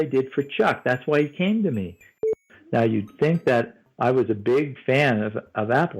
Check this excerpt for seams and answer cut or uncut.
cut